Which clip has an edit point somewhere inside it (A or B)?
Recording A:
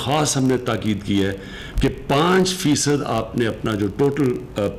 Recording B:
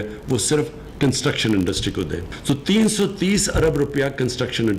B